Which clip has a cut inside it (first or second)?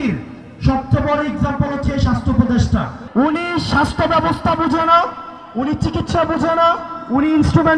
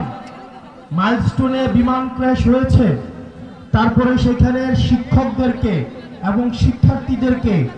first